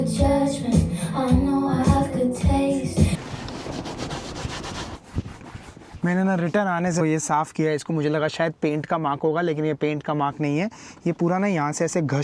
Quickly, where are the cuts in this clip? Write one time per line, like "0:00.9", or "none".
0:03.3
0:07.0